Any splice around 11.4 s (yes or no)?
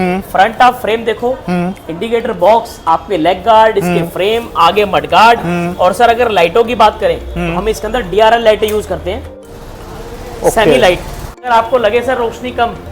yes